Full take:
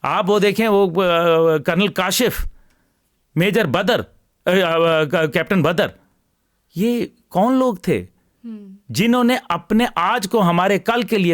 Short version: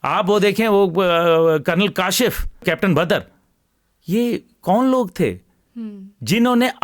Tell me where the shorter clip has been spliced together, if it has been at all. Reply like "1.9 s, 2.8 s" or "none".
2.6 s